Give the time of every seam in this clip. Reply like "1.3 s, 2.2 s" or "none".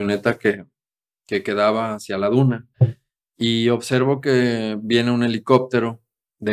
2.7 s